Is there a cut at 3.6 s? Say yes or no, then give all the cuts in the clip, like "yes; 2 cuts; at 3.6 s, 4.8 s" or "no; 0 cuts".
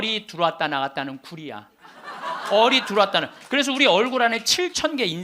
no; 0 cuts